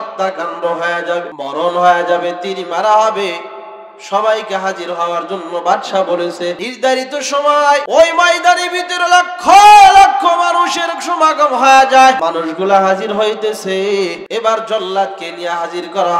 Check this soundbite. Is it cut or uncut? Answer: cut